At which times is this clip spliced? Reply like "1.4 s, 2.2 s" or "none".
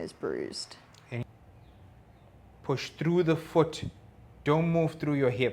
1.2 s